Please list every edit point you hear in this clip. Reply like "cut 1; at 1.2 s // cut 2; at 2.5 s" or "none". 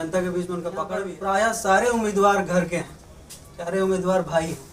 cut 1; at 1.0 s